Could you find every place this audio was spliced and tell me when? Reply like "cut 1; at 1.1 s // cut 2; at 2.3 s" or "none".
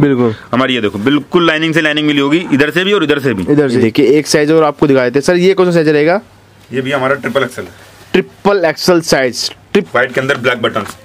cut 1; at 3.8 s // cut 2; at 9.9 s